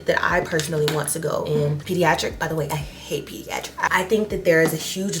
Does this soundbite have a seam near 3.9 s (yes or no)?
yes